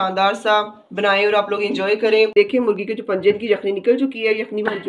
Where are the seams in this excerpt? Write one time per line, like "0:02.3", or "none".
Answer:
0:02.3